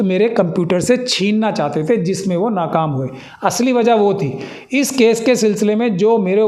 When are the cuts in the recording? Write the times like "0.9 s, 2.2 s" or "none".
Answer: none